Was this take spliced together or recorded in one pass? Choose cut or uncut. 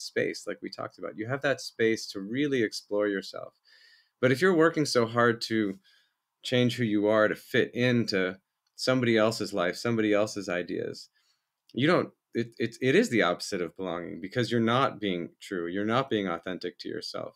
uncut